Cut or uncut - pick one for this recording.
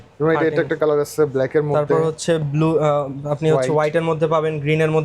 uncut